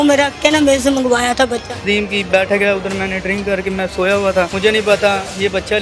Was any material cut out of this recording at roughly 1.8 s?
yes; 2 cuts; at 1.8 s, 4.5 s

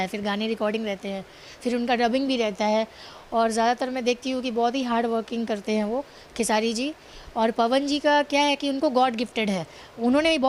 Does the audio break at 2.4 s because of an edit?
no; 0 cuts

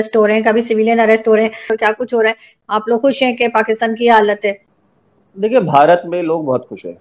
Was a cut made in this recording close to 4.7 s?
yes; 3 cuts; at 1.7 s, 2.6 s, 4.7 s

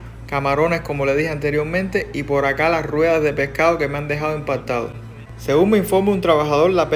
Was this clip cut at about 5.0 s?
no; 0 cuts

